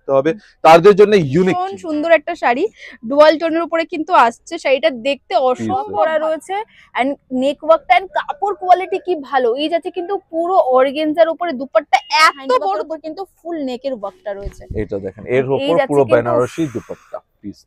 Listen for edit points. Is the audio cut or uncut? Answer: cut